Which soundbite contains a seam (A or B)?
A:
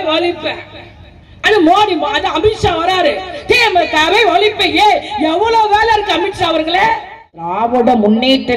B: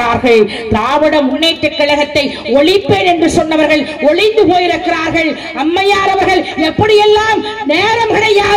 A